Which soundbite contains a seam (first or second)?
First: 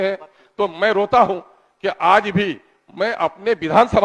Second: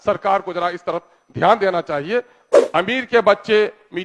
second